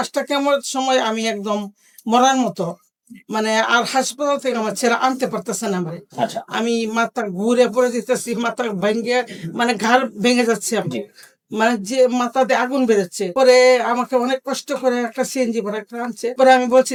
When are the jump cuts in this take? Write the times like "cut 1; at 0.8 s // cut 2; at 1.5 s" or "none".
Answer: none

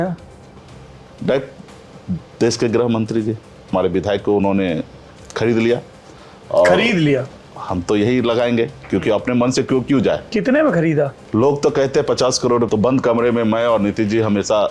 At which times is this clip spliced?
cut 1; at 3.7 s // cut 2; at 11.2 s // cut 3; at 12.7 s

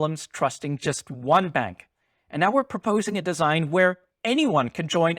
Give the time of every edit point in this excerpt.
cut 1; at 4.1 s

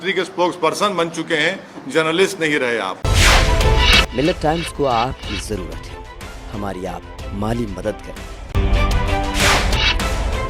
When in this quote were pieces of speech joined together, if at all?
cut 1; at 3.0 s

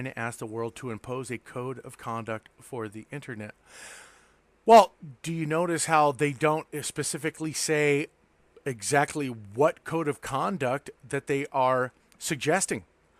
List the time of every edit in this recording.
cut 1; at 8.2 s

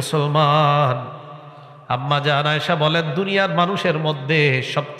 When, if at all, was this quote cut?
none

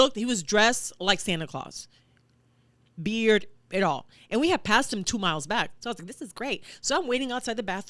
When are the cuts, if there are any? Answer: none

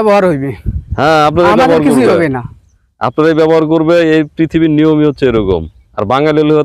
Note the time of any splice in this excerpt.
none

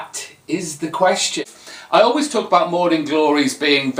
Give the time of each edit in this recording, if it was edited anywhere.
cut 1; at 1.4 s

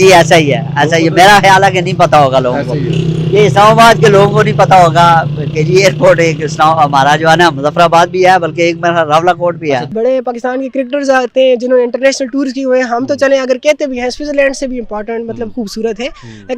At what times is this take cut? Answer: cut 1; at 9.9 s

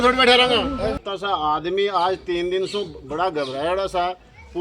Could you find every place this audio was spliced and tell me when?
cut 1; at 1.0 s

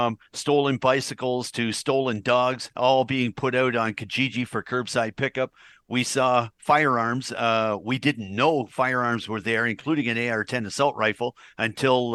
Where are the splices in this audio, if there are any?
none

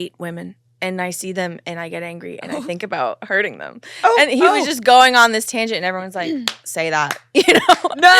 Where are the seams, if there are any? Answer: none

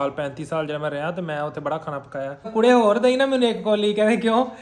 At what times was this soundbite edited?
cut 1; at 2.5 s

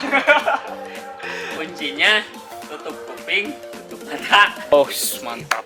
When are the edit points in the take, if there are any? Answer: cut 1; at 4.7 s

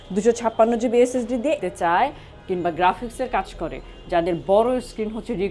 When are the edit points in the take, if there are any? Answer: cut 1; at 1.6 s

